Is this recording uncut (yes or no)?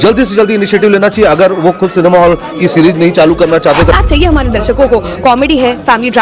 no